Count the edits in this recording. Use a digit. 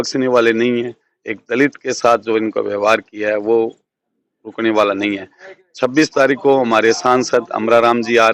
0